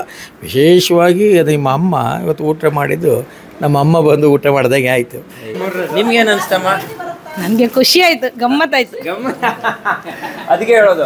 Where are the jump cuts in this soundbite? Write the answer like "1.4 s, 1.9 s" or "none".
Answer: 5.6 s